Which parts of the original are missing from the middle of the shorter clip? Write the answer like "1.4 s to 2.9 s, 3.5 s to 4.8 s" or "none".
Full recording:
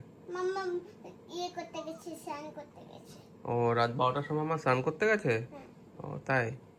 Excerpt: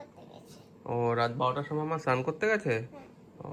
none

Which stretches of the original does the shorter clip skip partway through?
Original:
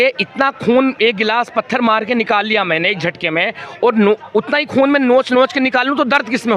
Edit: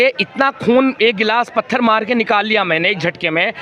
none

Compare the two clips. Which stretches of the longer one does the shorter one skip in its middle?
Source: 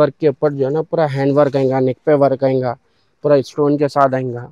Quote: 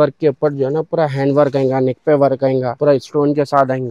2.7 s to 3.2 s

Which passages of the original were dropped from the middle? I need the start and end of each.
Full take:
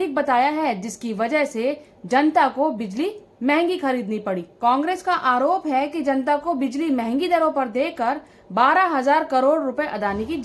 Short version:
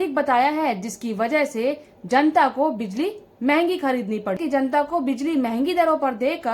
4.4 s to 5.9 s

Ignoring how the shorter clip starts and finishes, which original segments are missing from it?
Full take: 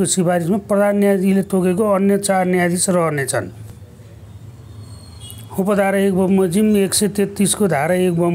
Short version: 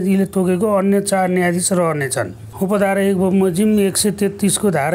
3.6 s to 5.4 s

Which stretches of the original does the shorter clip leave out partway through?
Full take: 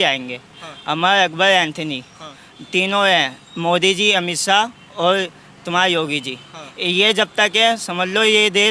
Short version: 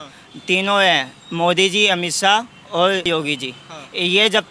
5.3 s to 5.9 s

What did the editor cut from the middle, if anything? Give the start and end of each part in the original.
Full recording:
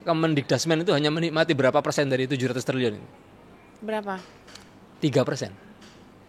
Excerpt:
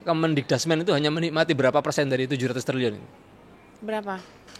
none

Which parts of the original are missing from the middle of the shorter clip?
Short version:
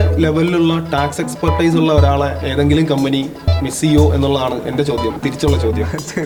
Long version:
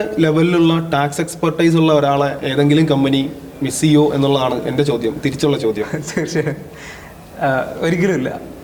none

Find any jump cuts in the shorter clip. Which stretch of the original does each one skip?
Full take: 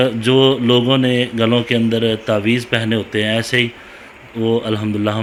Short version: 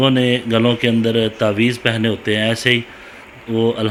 none

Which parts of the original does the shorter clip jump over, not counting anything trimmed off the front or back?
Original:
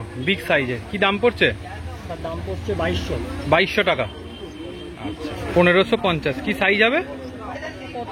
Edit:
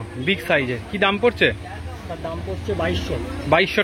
none

